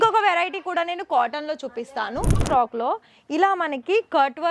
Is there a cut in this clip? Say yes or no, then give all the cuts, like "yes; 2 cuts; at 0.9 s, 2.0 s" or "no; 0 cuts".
yes; 1 cut; at 2.4 s